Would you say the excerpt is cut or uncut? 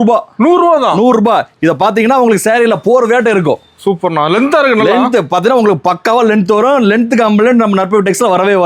uncut